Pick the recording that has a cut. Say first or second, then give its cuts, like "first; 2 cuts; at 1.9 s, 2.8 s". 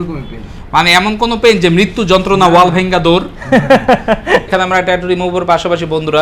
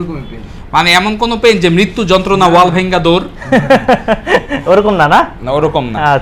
first; 1 cut; at 4.5 s